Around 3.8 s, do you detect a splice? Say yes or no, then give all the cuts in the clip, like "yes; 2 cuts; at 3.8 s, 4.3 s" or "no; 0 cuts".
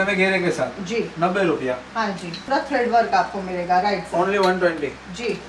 no; 1 cut; at 2.4 s